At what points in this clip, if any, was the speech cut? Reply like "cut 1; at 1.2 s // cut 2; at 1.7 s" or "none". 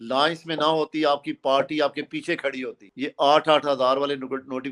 cut 1; at 2.9 s